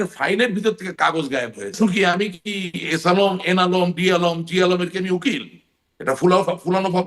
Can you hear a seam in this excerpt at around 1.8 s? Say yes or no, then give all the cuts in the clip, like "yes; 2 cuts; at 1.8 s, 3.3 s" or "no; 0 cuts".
yes; 1 cut; at 1.8 s